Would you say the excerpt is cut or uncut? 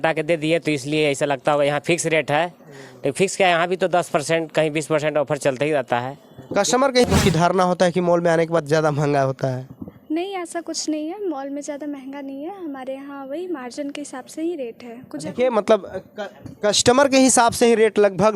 cut